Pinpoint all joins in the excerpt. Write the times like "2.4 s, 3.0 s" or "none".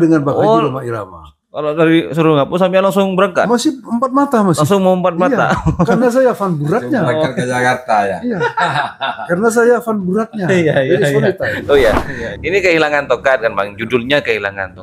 11.6 s